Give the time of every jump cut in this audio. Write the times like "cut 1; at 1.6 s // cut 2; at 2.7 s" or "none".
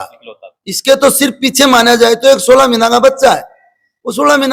none